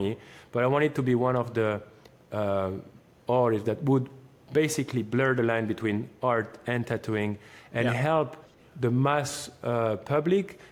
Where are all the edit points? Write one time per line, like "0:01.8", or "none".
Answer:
none